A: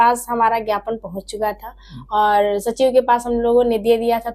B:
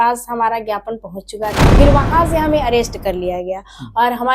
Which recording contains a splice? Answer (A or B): B